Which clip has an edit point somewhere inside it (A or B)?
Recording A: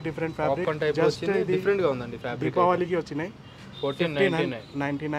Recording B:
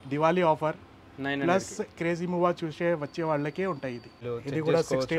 B